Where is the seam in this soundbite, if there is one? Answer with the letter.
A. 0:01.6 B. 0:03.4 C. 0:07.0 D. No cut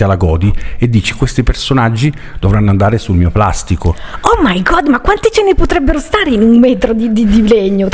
D